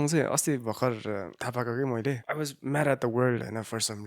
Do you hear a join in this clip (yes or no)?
yes